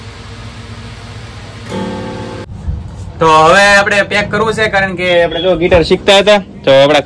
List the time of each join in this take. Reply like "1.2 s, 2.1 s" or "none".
none